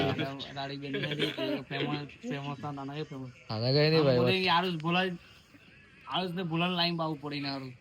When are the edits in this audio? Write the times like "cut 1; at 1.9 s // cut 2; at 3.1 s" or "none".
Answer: none